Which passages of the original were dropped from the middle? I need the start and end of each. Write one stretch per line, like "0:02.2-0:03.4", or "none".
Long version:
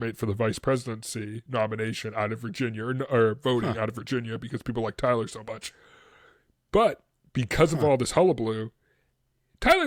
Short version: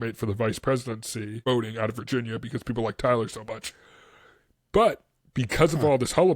0:01.4-0:03.4